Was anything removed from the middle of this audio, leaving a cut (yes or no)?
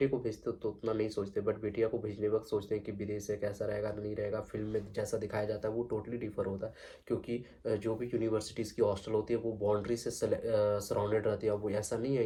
no